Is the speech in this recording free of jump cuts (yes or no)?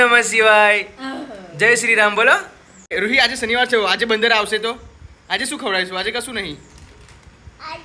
no